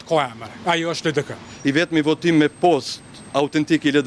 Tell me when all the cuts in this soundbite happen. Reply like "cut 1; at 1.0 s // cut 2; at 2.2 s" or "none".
cut 1; at 1.5 s